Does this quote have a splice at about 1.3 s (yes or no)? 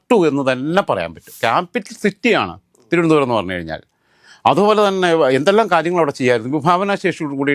yes